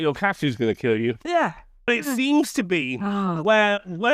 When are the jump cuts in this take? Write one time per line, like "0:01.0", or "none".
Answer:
0:01.9